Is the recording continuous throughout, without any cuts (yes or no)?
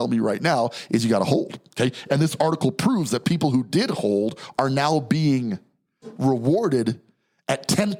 yes